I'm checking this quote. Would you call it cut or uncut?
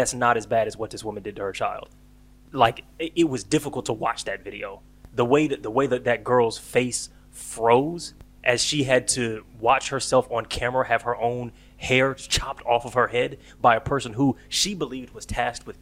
uncut